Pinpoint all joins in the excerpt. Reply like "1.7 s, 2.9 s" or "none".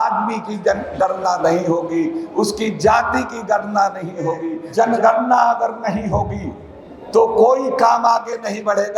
4.6 s